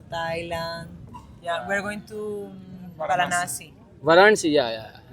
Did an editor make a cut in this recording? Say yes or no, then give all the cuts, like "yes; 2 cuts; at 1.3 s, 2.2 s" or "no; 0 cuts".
no; 0 cuts